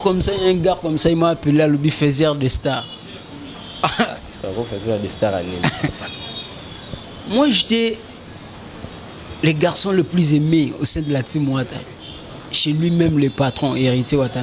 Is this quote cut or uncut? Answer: cut